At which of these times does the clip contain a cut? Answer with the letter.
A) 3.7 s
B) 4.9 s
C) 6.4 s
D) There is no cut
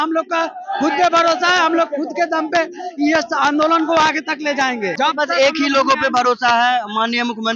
B